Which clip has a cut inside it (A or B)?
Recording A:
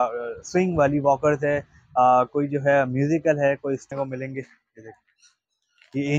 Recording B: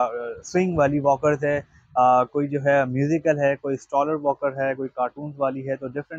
A